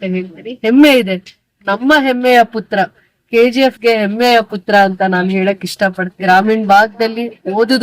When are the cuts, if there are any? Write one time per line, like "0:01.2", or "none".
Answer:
0:06.1